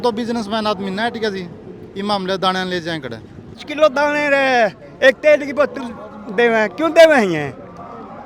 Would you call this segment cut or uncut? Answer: cut